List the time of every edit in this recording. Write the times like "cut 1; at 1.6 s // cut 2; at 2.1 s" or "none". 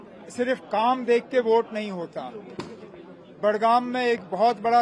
none